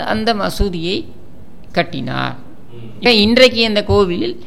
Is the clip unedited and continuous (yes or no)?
no